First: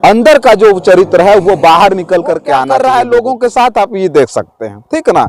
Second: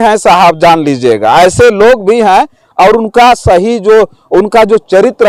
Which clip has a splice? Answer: first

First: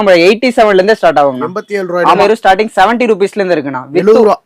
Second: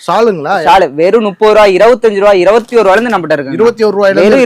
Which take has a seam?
first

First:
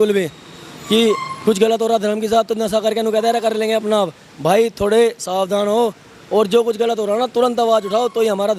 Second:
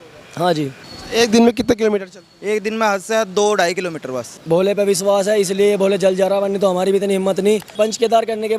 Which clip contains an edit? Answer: second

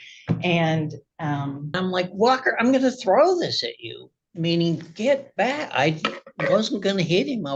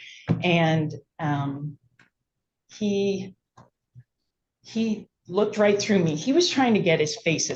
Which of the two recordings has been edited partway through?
first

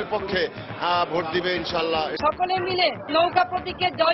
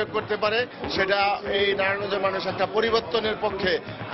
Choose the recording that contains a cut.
first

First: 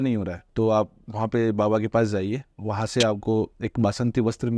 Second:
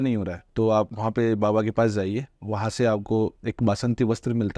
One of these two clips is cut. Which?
second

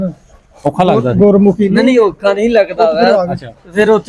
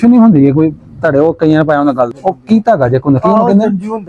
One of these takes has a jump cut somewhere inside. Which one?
second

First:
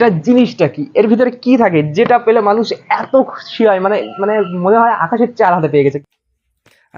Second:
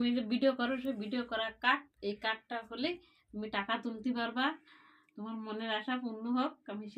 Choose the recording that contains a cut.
first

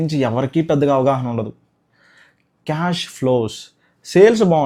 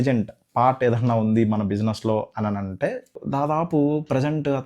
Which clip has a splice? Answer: second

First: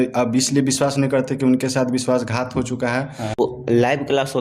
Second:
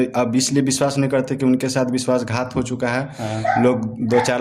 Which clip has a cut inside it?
first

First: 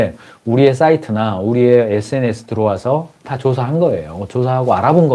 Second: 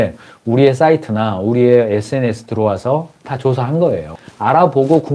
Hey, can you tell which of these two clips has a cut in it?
second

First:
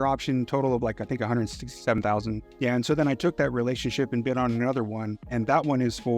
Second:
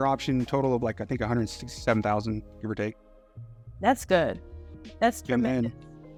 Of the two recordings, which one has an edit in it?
first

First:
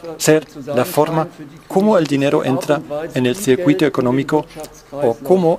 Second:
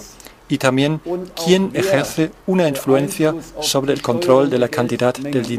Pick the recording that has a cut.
first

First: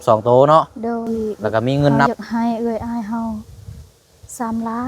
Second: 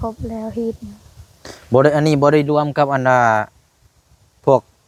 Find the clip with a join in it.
first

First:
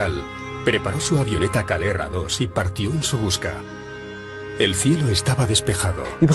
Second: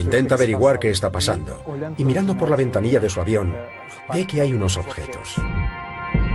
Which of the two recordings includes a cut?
first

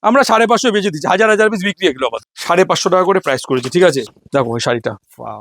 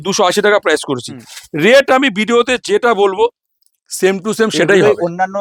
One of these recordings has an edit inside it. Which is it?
first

